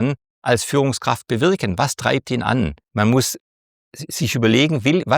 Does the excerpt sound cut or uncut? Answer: cut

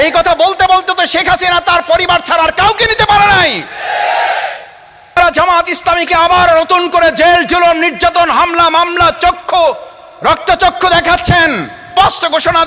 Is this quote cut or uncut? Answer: cut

